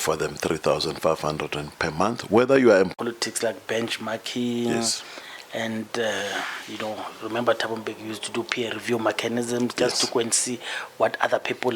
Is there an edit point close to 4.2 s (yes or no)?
no